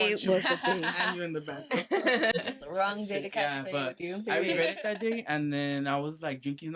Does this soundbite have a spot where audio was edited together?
no; 0 cuts

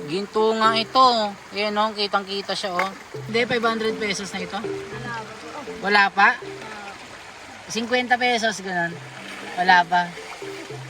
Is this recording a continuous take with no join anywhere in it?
no; 1 cut; at 3.3 s

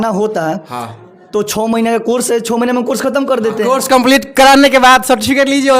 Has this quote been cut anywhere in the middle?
no; 0 cuts

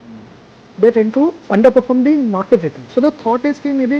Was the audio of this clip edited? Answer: yes; 1 cut; at 2.8 s

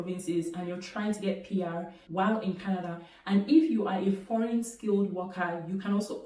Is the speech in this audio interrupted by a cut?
yes; 1 cut; at 2.1 s

